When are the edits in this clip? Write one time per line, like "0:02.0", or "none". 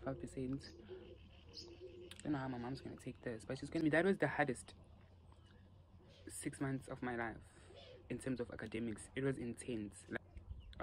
0:03.8
0:10.2